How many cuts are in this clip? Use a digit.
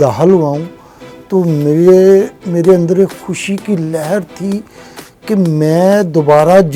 0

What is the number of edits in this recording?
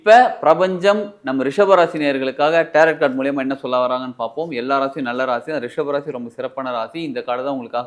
0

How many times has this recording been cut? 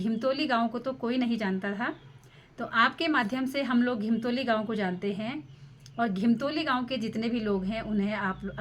0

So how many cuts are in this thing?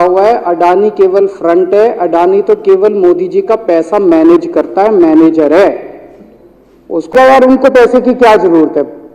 1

